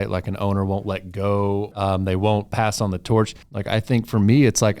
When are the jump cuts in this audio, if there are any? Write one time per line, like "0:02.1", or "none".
0:01.8
0:03.5